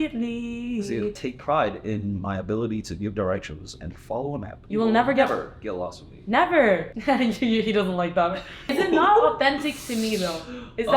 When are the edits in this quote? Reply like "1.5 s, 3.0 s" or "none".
1.2 s, 4.6 s, 6.9 s, 8.7 s